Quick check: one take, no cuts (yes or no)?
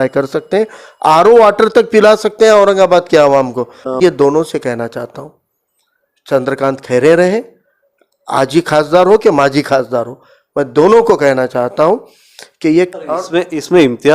no